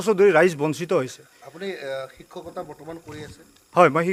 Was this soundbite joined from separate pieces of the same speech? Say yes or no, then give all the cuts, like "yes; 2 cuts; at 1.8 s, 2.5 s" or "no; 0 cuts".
no; 0 cuts